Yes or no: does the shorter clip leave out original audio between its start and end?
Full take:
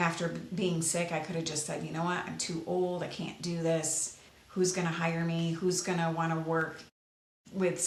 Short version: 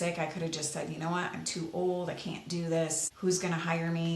yes